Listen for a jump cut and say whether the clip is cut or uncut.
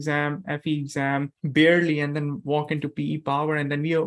cut